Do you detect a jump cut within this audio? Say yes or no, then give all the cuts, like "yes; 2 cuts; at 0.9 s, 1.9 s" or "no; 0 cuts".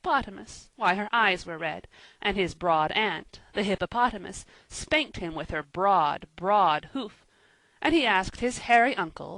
yes; 1 cut; at 5.1 s